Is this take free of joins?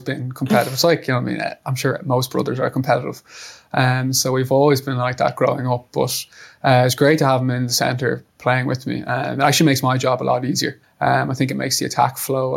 no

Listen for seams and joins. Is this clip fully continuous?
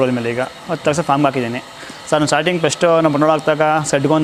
yes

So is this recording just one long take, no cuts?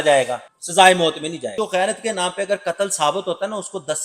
no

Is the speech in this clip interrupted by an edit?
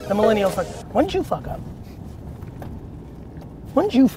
no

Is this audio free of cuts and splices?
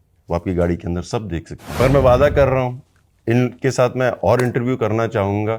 no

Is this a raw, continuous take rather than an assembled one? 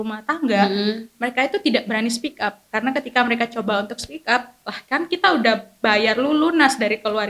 yes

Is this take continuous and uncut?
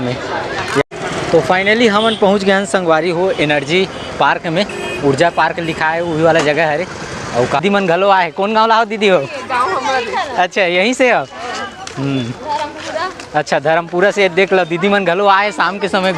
no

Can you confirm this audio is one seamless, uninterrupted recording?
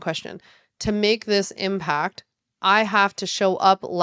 yes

